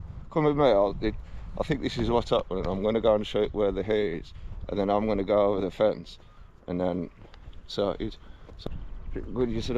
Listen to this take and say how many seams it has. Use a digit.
1